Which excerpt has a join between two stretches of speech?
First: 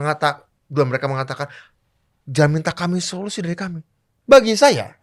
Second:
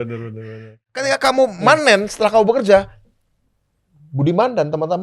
second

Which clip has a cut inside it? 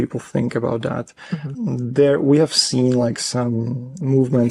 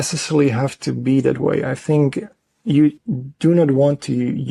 second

